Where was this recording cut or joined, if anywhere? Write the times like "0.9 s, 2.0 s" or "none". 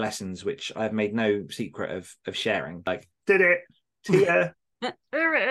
2.9 s